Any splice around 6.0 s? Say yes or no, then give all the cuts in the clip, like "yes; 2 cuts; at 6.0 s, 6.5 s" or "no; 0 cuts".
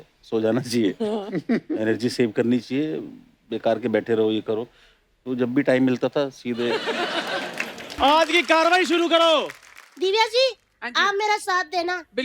no; 1 cut; at 7.8 s